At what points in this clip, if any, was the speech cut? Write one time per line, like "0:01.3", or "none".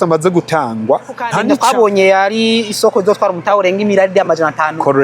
0:01.3

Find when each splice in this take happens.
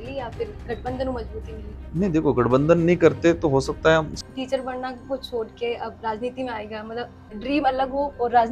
0:04.1
0:07.2

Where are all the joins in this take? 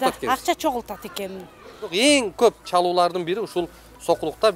0:01.8

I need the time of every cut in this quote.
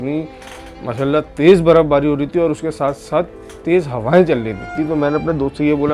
0:04.7

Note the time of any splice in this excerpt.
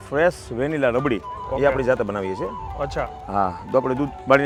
none

